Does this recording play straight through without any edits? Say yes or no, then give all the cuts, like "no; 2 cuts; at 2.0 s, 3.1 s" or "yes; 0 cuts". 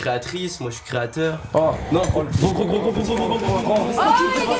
yes; 0 cuts